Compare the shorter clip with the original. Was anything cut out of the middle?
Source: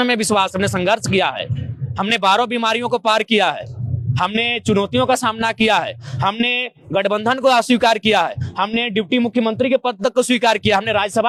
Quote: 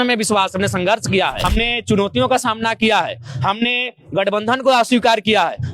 yes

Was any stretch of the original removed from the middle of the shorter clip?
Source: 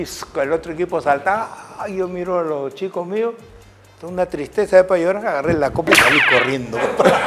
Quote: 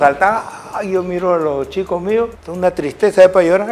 yes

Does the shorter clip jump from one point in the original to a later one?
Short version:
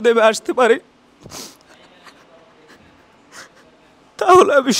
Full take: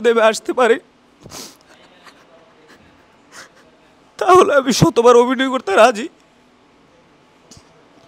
no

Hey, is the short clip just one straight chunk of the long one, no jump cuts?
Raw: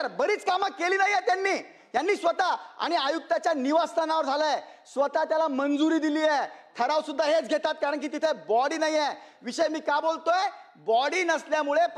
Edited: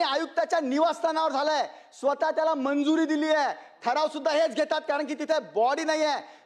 yes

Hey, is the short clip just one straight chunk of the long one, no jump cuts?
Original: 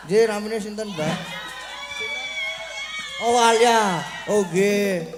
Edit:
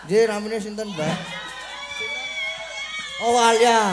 yes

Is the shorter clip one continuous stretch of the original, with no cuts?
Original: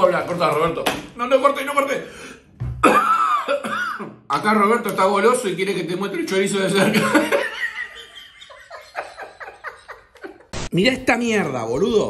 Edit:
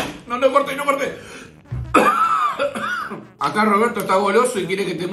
yes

